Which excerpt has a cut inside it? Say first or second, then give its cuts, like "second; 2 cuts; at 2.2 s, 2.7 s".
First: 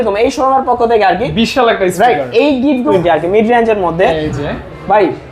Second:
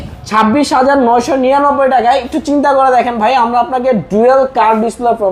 first; 1 cut; at 2.9 s